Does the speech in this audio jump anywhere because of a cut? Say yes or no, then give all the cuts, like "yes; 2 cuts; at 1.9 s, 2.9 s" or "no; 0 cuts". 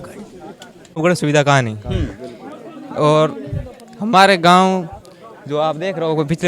yes; 1 cut; at 1.0 s